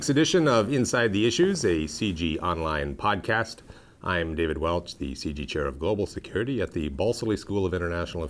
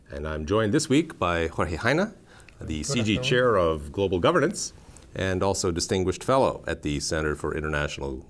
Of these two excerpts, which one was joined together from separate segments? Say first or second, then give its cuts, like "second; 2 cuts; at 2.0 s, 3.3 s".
second; 1 cut; at 3.4 s